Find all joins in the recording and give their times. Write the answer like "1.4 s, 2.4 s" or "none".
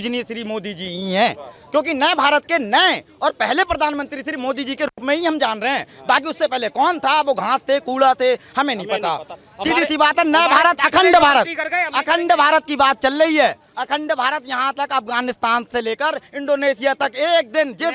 none